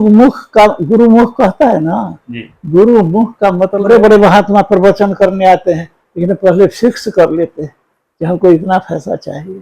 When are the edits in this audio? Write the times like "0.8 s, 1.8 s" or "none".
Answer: 3.8 s